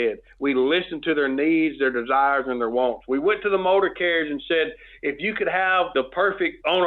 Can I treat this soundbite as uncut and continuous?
yes; 0 cuts

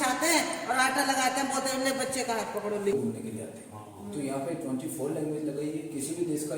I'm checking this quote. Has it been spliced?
yes; 1 cut; at 2.9 s

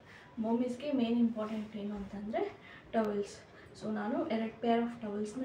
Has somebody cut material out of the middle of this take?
no; 0 cuts

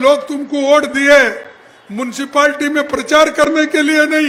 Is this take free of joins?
yes; 0 cuts

